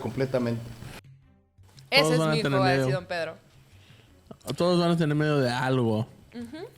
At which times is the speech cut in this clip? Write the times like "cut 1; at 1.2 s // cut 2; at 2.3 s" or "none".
cut 1; at 1.2 s